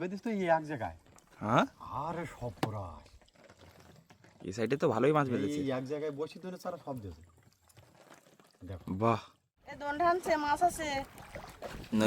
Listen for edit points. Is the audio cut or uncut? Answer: cut